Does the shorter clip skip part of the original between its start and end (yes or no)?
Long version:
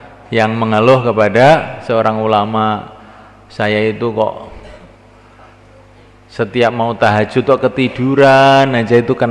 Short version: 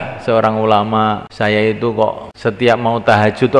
yes